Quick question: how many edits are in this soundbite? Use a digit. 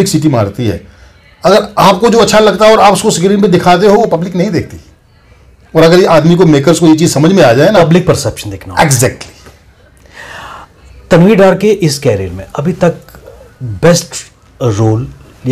0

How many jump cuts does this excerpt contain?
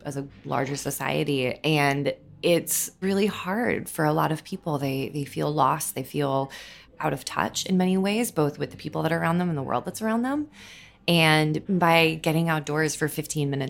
2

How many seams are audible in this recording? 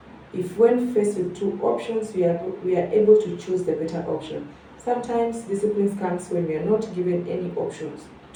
0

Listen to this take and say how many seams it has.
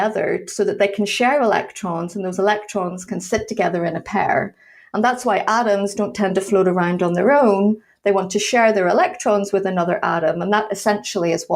0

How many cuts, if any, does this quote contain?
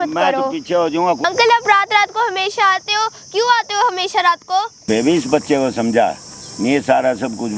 2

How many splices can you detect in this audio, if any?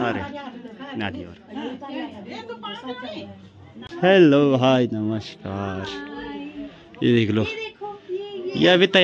1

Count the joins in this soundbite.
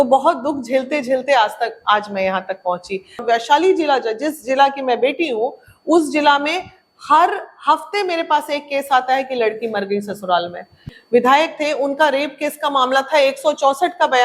2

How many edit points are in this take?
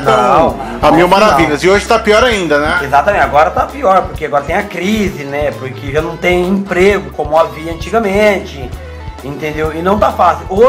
0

